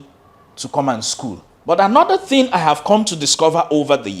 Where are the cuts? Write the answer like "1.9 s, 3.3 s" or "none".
1.5 s